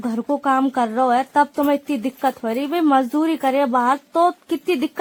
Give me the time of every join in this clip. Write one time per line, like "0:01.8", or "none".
none